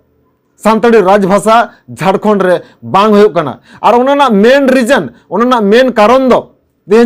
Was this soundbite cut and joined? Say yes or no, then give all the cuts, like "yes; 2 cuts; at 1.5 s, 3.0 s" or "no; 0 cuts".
no; 0 cuts